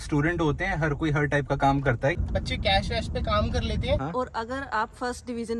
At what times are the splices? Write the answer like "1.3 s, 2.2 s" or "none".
2.2 s, 4.0 s